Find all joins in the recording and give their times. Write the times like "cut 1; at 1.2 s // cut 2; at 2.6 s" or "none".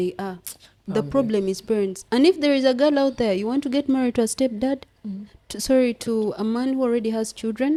none